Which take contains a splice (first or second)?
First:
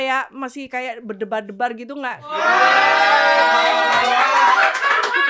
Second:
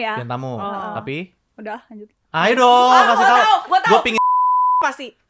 first